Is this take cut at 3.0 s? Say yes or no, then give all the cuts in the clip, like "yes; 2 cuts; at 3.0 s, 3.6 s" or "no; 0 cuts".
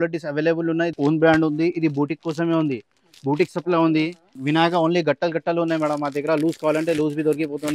no; 2 cuts; at 0.9 s, 4.4 s